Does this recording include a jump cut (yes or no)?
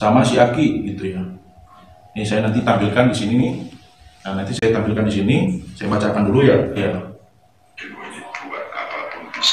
yes